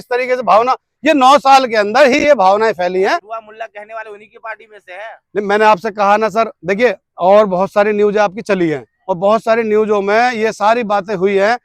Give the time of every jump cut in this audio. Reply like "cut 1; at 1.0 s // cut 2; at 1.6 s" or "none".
none